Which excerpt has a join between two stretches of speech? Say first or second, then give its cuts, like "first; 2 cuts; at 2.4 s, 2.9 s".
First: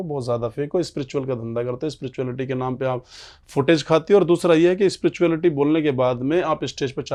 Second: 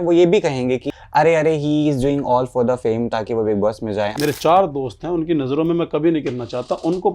second; 2 cuts; at 0.9 s, 4.1 s